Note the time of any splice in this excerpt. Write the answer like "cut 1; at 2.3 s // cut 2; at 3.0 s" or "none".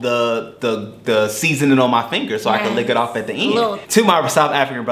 cut 1; at 3.8 s

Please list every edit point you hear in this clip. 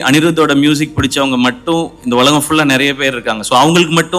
none

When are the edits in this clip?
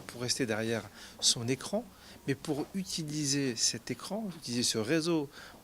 cut 1; at 1.6 s

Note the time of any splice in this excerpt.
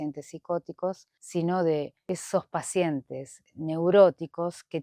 cut 1; at 1.1 s // cut 2; at 2.0 s

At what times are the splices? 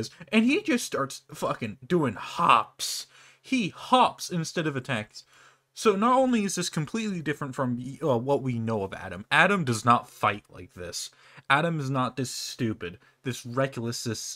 none

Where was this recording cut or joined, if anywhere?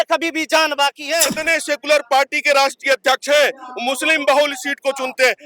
cut 1; at 1.4 s

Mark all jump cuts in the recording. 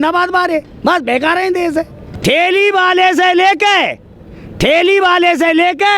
cut 1; at 2.0 s

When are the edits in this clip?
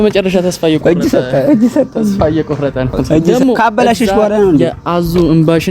cut 1; at 3.3 s

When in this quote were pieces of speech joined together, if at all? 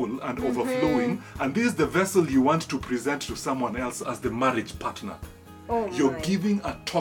cut 1; at 4.1 s

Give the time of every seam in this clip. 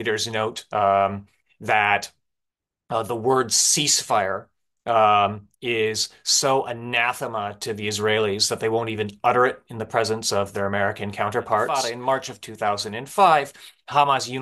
cut 1; at 11.7 s

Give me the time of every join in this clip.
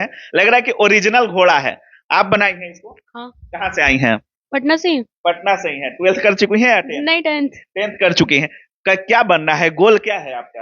none

